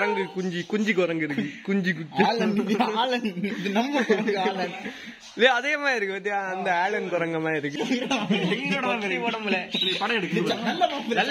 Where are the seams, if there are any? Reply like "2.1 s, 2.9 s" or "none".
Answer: 7.7 s